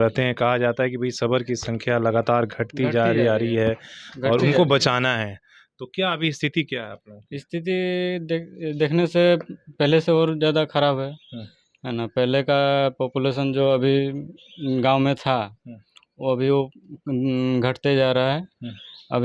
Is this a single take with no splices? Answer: yes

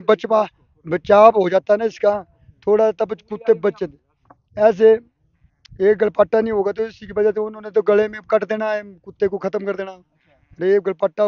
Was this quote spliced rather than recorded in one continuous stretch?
no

